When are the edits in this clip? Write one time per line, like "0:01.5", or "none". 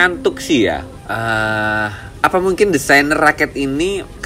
0:01.0
0:02.0